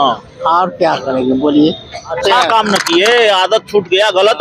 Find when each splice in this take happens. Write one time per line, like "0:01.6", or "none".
0:02.1